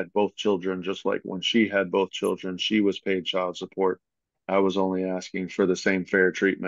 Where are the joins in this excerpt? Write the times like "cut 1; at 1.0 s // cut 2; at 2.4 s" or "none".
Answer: none